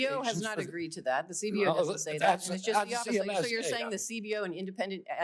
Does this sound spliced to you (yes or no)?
no